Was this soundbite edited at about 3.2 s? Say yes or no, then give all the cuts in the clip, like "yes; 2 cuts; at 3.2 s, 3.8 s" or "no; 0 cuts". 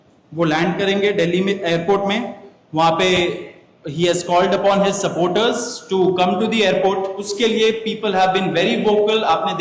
no; 1 cut; at 7.3 s